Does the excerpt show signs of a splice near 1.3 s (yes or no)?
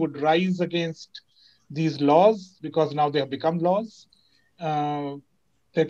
no